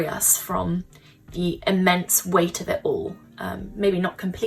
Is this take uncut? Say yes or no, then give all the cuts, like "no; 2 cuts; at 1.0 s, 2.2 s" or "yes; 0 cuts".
yes; 0 cuts